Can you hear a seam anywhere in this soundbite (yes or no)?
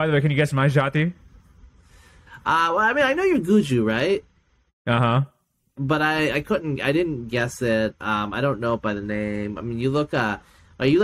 no